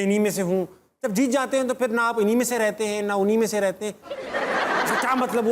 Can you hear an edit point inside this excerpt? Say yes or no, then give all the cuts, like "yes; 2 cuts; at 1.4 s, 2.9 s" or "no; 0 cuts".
yes; 1 cut; at 4.0 s